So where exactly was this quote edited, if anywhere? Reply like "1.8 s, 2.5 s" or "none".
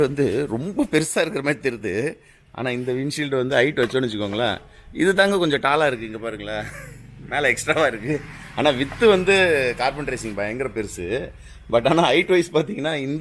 none